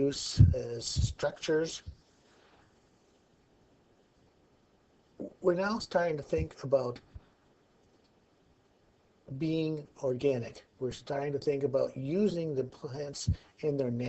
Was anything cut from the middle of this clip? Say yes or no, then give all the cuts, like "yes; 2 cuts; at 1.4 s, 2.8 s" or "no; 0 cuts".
yes; 1 cut; at 3.7 s